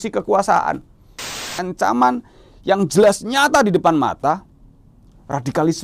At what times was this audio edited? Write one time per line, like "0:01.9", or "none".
0:01.5